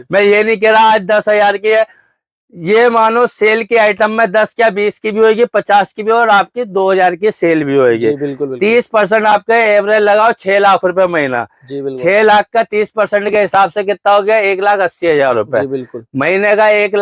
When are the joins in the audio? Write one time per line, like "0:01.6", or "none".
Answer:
none

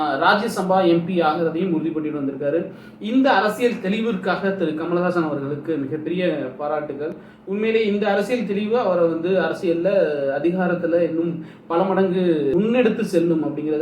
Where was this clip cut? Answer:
0:12.5

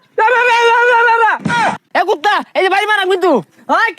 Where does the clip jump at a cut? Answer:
0:01.8

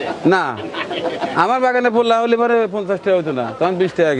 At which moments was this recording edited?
none

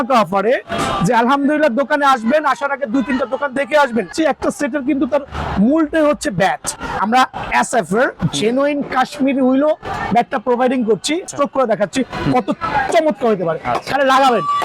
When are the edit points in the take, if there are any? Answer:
0:04.1
0:06.7
0:11.3

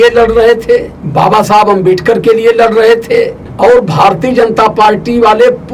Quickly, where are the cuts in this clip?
0:01.0
0:03.4

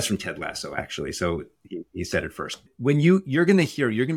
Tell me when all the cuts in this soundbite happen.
0:02.6

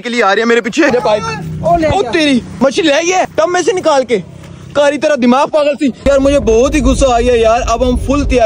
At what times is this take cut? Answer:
0:00.9
0:02.5
0:03.3
0:06.1

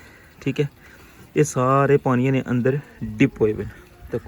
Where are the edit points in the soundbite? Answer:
none

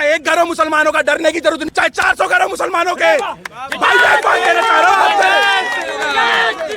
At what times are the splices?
0:01.6

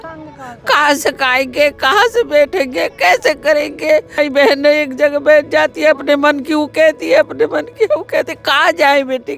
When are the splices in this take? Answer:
0:04.2

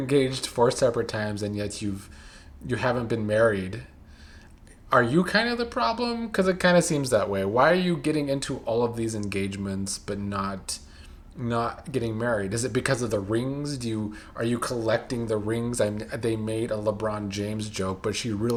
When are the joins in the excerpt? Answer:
none

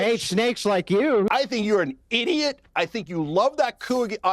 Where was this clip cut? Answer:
0:01.3

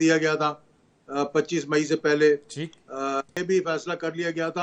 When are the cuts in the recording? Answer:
0:03.4

